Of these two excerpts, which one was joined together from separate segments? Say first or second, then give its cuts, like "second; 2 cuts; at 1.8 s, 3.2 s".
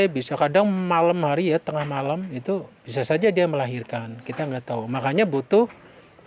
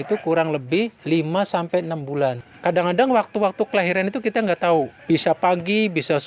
second; 3 cuts; at 1.0 s, 2.5 s, 5.0 s